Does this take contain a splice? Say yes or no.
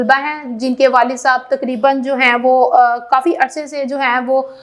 no